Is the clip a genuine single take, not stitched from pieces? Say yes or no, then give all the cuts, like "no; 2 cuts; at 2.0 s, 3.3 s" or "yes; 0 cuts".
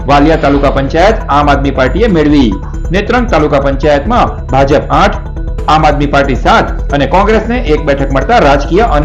yes; 0 cuts